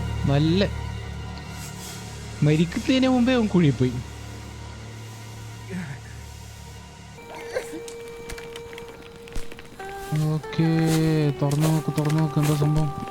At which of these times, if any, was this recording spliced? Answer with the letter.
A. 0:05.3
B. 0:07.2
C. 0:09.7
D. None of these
B